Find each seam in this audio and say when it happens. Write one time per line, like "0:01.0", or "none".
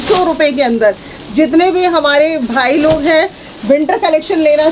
none

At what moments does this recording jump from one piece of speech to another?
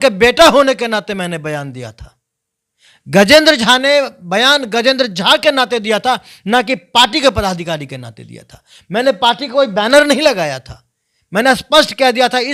none

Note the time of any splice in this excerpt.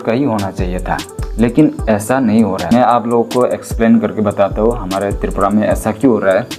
0:02.7

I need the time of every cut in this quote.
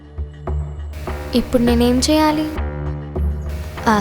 0:01.2
0:02.5

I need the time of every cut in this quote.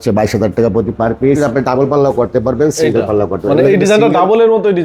0:01.4

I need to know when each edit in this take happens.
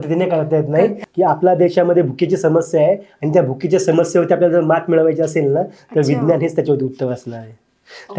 0:01.0

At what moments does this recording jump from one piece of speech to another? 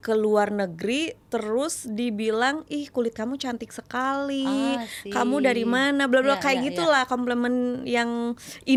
none

